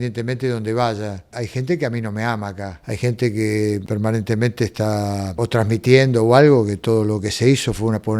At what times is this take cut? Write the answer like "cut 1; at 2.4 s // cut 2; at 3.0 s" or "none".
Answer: cut 1; at 1.3 s // cut 2; at 2.7 s // cut 3; at 3.8 s // cut 4; at 5.3 s